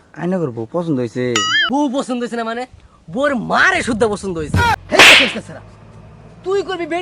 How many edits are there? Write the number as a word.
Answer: two